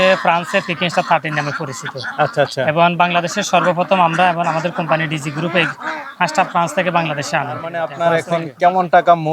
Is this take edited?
yes; 1 cut; at 7.9 s

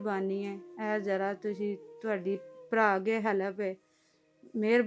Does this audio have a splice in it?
no; 0 cuts

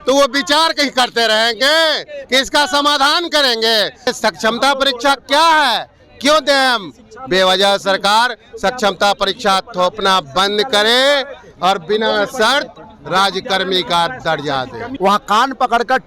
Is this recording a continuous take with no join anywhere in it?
no; 2 cuts; at 4.1 s, 14.9 s

